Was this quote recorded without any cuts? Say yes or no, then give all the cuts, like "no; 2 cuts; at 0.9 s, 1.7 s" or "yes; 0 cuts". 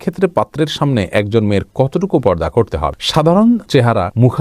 yes; 0 cuts